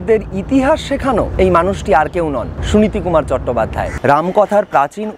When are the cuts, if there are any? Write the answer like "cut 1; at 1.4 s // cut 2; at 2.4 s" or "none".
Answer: cut 1; at 1.3 s // cut 2; at 2.5 s // cut 3; at 3.9 s

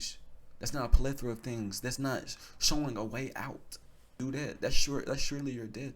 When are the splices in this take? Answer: cut 1; at 4.2 s

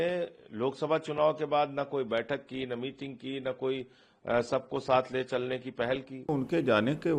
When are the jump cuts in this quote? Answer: cut 1; at 6.3 s

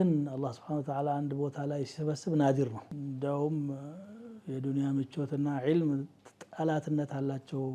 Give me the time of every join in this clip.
cut 1; at 2.9 s

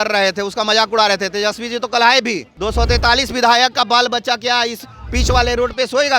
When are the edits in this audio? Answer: cut 1; at 2.5 s

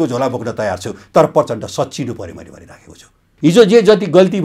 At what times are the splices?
cut 1; at 3.2 s

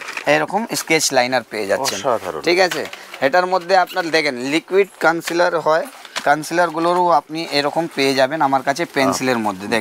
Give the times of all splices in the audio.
none

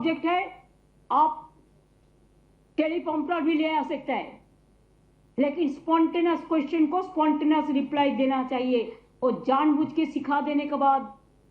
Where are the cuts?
none

